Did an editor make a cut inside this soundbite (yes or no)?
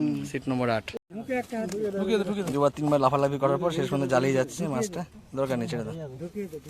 yes